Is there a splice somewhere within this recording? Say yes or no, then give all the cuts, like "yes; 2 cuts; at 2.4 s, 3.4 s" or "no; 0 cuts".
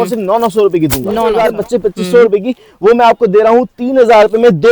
yes; 1 cut; at 1.3 s